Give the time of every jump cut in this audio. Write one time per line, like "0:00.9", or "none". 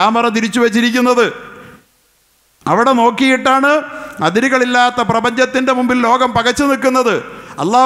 none